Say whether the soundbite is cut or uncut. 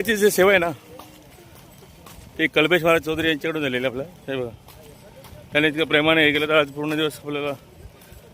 cut